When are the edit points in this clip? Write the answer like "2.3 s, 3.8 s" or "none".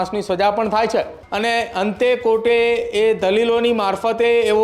1.2 s